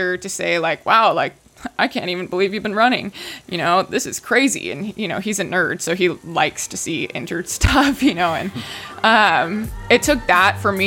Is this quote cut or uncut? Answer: uncut